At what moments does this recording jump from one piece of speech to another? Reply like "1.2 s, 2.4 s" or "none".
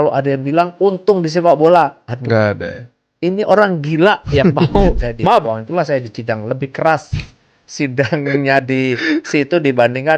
5.4 s